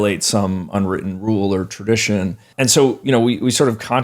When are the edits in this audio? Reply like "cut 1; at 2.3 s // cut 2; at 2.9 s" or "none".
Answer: cut 1; at 2.5 s